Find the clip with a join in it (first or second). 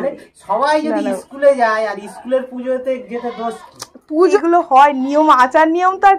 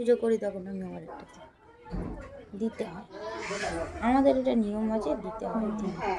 first